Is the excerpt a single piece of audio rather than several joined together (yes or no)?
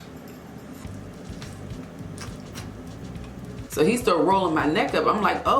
no